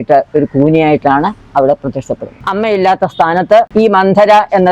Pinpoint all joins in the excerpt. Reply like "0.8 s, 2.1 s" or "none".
2.4 s